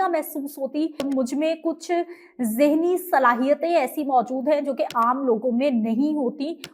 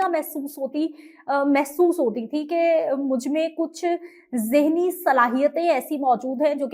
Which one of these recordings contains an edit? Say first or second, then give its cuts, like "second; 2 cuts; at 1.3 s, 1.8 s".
first; 1 cut; at 1.0 s